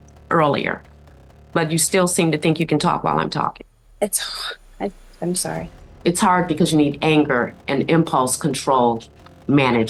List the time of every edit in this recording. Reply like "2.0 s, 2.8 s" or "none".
none